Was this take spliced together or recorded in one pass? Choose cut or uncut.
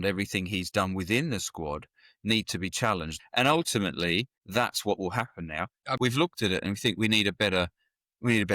cut